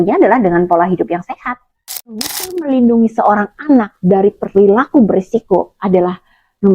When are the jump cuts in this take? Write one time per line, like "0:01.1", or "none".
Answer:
0:02.1